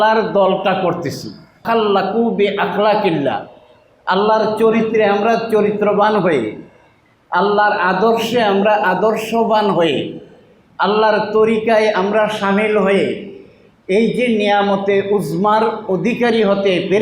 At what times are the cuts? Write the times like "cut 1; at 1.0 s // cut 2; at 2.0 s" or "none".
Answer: cut 1; at 1.6 s